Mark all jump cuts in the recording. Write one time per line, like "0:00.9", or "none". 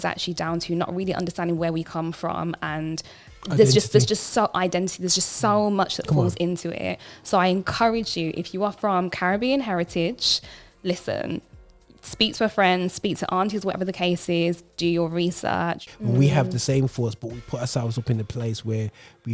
0:15.9